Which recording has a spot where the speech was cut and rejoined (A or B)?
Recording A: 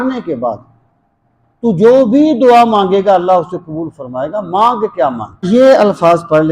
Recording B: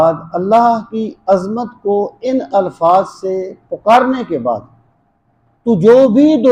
A